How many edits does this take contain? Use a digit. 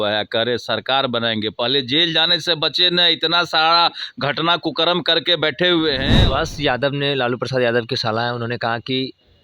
1